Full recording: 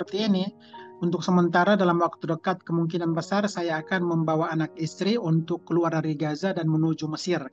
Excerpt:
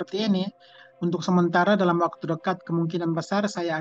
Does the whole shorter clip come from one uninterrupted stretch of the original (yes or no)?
yes